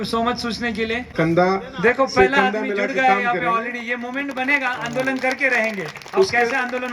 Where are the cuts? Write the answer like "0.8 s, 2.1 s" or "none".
1.1 s